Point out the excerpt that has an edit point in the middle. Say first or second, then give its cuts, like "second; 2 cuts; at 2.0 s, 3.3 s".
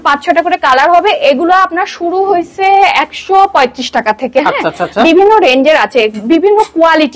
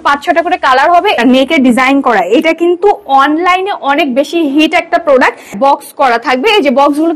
second; 2 cuts; at 1.2 s, 5.5 s